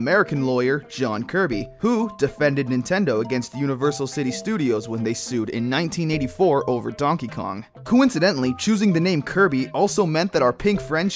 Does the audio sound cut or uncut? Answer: cut